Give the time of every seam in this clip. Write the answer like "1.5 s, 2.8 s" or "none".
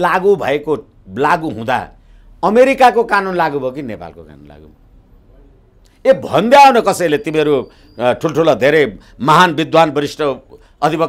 none